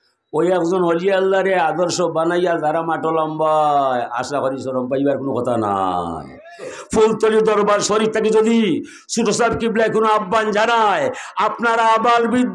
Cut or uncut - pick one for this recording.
cut